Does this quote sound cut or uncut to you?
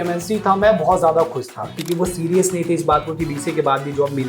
cut